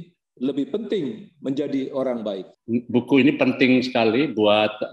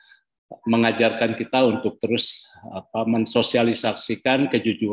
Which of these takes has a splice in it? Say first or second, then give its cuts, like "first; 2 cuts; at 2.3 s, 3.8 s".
first; 1 cut; at 2.5 s